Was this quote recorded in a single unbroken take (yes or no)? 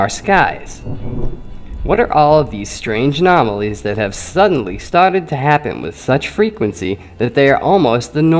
no